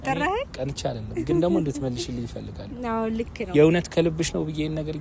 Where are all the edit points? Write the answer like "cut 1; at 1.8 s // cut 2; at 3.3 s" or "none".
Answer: none